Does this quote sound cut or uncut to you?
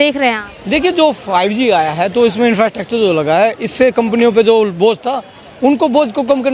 uncut